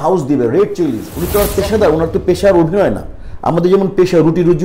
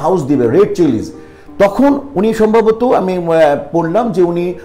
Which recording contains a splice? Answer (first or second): first